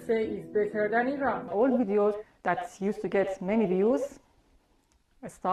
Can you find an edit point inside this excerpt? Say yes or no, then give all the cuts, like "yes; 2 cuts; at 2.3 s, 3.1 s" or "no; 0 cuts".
yes; 1 cut; at 1.5 s